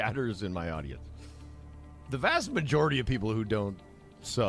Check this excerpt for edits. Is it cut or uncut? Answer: cut